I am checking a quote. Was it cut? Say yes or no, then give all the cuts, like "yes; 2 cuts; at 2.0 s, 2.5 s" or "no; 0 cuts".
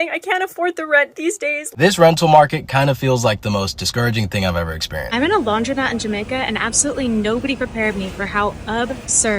yes; 2 cuts; at 1.6 s, 5.1 s